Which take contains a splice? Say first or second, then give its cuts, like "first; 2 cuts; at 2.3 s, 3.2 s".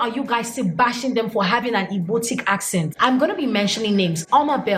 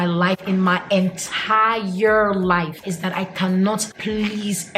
first; 1 cut; at 2.9 s